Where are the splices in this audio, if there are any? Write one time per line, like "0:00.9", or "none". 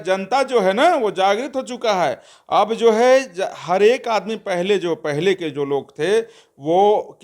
none